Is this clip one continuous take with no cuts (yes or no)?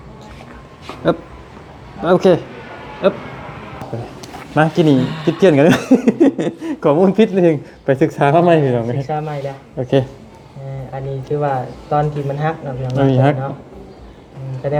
yes